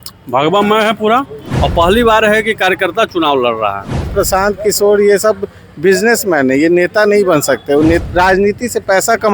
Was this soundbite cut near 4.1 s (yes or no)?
yes